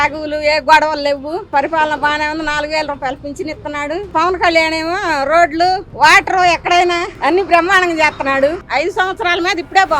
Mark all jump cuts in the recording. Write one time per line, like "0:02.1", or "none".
0:01.5
0:04.1
0:08.6